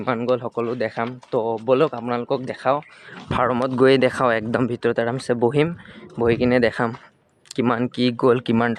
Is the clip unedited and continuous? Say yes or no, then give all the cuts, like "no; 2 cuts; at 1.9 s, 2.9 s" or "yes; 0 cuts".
yes; 0 cuts